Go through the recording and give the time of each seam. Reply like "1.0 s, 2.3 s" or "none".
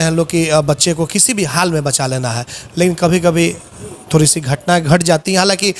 none